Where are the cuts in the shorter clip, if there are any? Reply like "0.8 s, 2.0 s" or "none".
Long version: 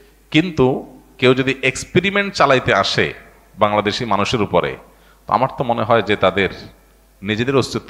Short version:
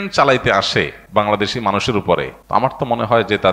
1.0 s, 2.3 s